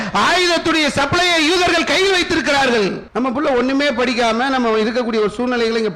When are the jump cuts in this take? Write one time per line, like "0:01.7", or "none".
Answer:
0:03.0